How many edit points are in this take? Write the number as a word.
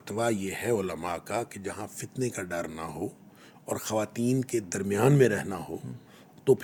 zero